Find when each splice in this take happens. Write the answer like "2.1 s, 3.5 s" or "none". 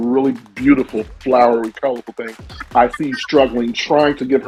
none